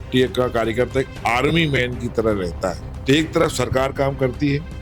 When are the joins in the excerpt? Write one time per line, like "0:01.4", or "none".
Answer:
0:02.9